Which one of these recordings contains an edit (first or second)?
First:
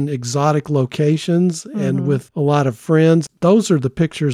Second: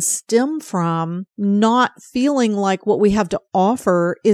first